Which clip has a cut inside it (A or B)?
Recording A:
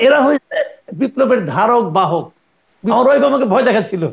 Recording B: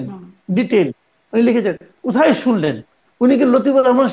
A